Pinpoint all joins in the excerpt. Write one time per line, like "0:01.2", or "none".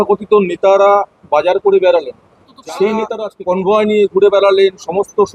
0:03.3